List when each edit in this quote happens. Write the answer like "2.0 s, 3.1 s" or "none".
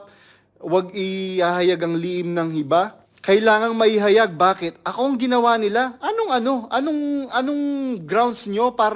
3.1 s